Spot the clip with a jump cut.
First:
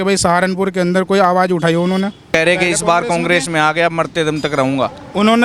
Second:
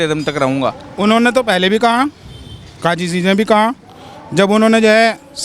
first; 1 cut; at 2.2 s

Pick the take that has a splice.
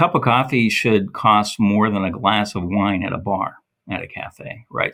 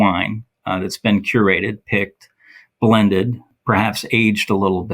second; 1 cut; at 3.5 s

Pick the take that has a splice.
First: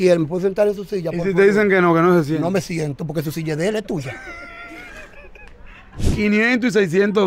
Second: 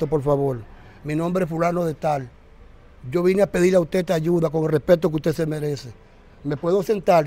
first; 1 cut; at 6.0 s

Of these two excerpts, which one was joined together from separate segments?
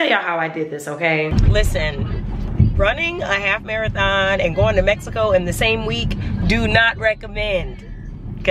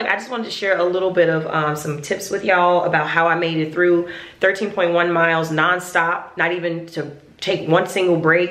first; 1 cut; at 1.3 s

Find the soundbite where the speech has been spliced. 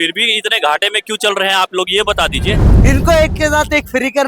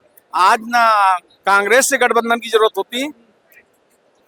first; 1 cut; at 2.7 s

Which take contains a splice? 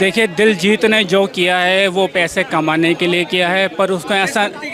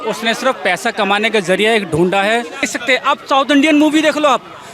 second; 1 cut; at 2.7 s

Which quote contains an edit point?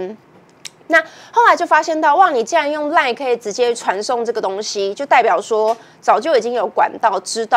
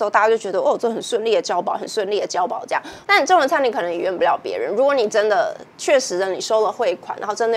second; 1 cut; at 2.9 s

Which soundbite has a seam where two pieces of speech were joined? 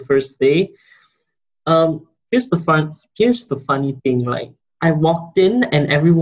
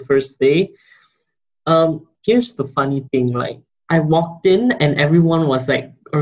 second; 1 cut; at 2.1 s

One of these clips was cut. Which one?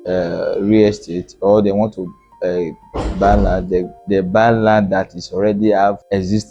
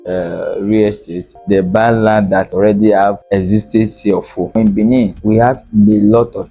second; 3 cuts; at 1.3 s, 2.5 s, 4.6 s

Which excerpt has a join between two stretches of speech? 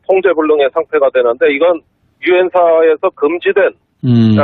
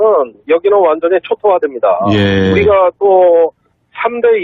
second; 1 cut; at 3.1 s

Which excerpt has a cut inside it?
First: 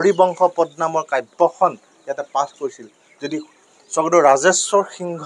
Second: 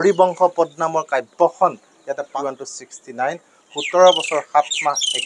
second; 1 cut; at 2.3 s

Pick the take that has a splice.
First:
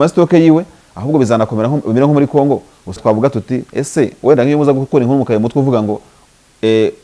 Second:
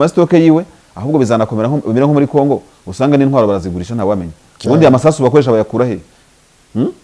first; 1 cut; at 3.0 s

